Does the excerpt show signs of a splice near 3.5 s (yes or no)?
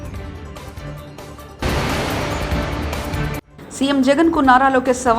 yes